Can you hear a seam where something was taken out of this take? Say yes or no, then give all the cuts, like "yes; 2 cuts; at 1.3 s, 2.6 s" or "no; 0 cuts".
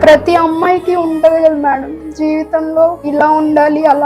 yes; 1 cut; at 3.0 s